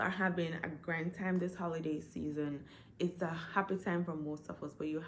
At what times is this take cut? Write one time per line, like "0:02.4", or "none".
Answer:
none